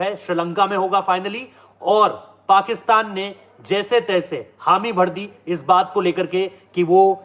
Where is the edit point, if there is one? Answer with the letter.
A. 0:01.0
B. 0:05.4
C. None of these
C